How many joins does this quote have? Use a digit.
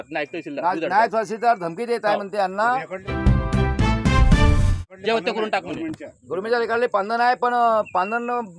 2